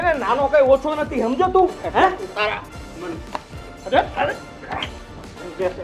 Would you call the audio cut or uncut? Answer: uncut